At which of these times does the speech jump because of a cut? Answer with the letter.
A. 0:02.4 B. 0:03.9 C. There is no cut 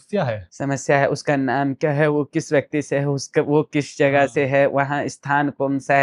C